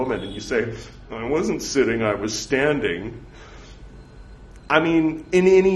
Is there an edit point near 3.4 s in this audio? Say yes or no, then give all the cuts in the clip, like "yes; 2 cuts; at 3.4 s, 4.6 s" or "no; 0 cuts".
no; 0 cuts